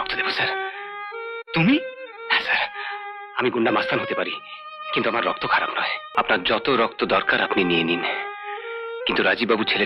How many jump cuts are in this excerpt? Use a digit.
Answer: 1